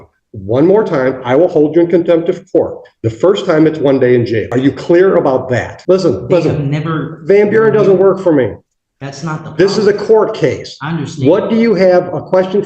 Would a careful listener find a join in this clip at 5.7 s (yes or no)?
yes